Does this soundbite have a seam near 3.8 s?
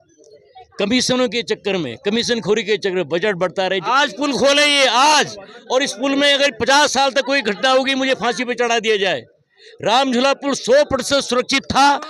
yes; 1 cut; at 3.8 s

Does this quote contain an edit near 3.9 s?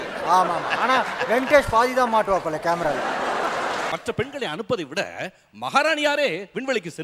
yes; 1 cut; at 3.9 s

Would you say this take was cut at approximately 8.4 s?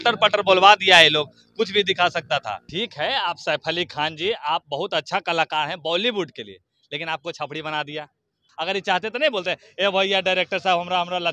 yes; 2 cuts; at 2.6 s, 8.4 s

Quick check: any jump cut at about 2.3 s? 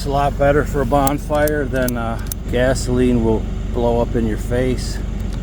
yes; 1 cut; at 2.3 s

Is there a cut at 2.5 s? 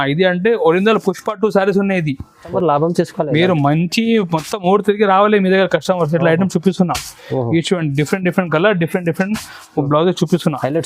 yes; 1 cut; at 2.5 s

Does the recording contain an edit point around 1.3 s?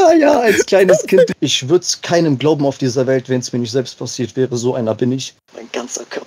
yes; 2 cuts; at 1.3 s, 5.3 s

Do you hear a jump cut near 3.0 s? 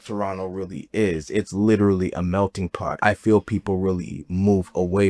yes; 1 cut; at 3.0 s

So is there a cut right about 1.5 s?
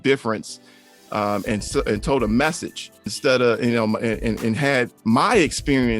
no; 2 cuts; at 3.1 s, 4.9 s

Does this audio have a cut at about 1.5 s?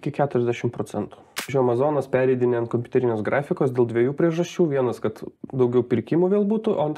yes; 1 cut; at 1.5 s

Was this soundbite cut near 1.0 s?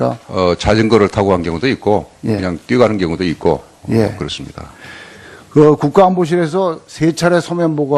yes; 1 cut; at 1.0 s

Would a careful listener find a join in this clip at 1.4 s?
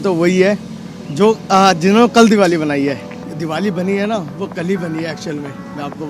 no; 1 cut; at 3.2 s

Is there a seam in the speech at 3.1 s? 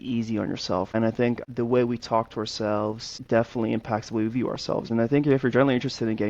yes; 3 cuts; at 1.0 s, 3.1 s, 4.9 s

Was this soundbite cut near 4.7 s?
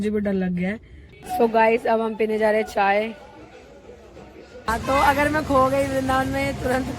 yes; 2 cuts; at 1.1 s, 4.7 s

